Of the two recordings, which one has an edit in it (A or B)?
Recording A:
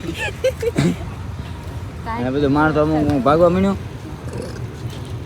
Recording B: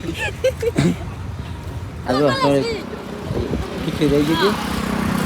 B